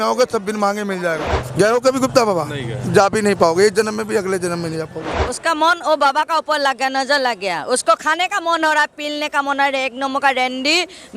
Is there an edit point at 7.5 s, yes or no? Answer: no